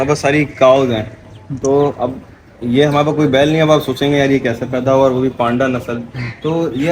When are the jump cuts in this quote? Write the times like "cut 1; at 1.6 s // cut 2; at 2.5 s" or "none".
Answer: none